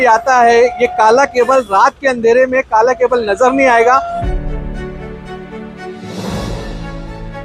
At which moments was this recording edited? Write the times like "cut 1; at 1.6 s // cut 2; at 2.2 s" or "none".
cut 1; at 4.2 s